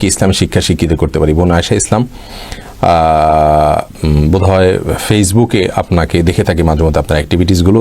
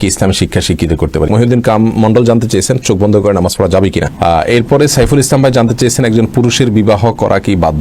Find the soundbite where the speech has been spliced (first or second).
second